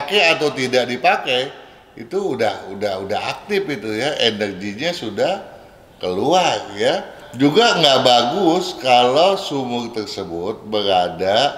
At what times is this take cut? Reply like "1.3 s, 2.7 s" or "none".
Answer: 7.2 s